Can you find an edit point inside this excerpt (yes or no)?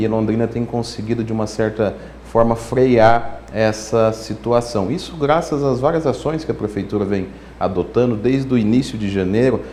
no